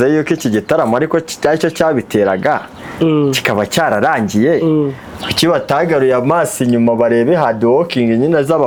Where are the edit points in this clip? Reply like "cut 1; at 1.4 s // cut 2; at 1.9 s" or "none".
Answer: none